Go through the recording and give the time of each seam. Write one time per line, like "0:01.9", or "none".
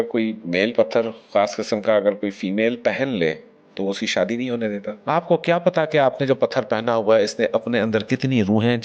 0:04.9